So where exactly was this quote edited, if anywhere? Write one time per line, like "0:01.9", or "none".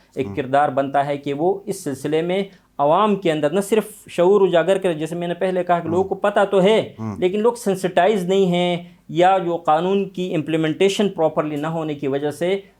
none

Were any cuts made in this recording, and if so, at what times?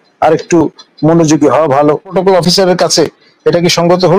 0:02.1

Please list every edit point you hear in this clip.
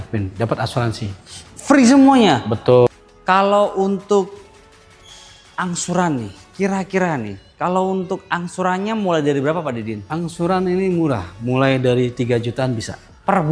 0:02.9

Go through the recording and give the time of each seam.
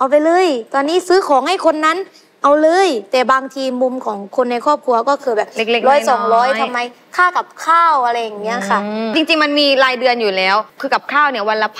0:10.7

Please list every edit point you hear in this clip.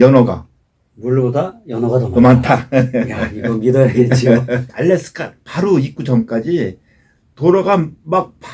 0:04.7

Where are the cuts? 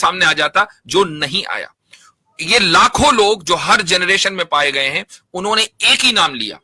none

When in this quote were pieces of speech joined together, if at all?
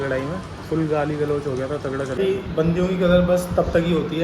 0:02.1

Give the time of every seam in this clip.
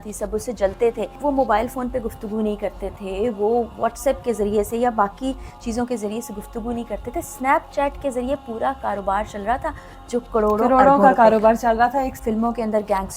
0:01.2
0:12.1

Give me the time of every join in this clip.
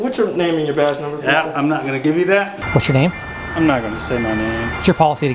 0:02.6

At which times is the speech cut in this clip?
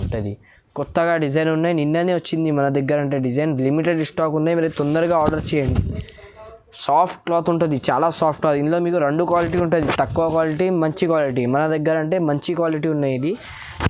none

